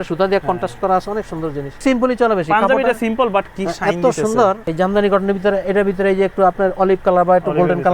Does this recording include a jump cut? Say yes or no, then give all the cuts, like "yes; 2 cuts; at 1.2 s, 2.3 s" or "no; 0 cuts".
yes; 2 cuts; at 1.8 s, 4.7 s